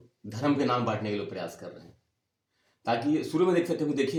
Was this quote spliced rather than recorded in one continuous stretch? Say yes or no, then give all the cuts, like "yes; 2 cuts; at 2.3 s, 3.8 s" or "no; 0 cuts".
no; 0 cuts